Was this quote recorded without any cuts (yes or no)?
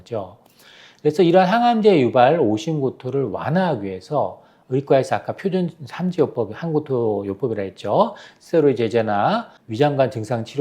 no